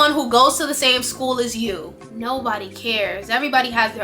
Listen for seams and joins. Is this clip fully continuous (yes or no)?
no